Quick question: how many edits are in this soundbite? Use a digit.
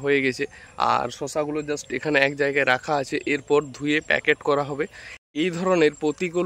1